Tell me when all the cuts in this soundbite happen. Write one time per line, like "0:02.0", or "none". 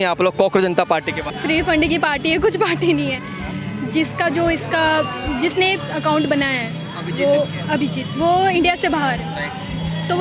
none